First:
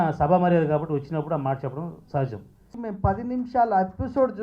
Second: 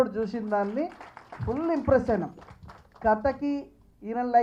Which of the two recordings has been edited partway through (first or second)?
first